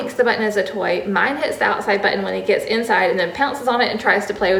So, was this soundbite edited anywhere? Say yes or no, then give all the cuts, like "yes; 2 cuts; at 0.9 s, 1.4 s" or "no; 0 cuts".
no; 0 cuts